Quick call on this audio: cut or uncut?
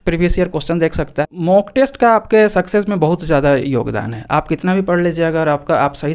cut